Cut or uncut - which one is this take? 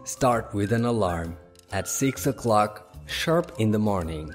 uncut